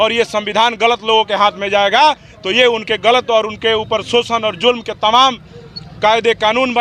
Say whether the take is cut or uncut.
uncut